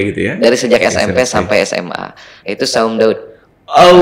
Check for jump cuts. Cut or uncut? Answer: cut